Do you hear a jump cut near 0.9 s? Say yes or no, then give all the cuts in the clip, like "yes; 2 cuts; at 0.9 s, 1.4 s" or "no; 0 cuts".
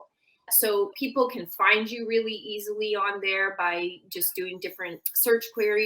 yes; 1 cut; at 0.9 s